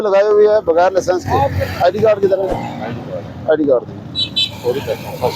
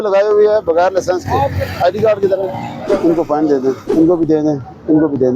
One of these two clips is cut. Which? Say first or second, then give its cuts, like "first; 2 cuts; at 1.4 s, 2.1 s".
second; 2 cuts; at 2.8 s, 3.8 s